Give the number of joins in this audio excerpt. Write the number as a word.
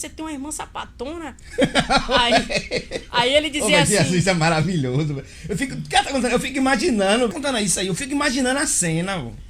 one